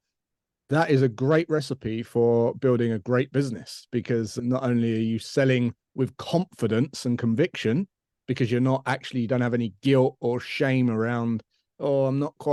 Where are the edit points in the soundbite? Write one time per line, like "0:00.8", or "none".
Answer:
0:04.3